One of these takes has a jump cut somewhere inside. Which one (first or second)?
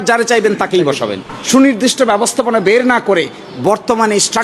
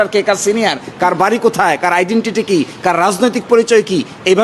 first